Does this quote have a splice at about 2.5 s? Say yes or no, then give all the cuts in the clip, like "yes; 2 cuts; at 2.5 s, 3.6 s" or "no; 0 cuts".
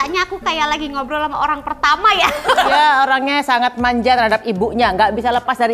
yes; 1 cut; at 2.5 s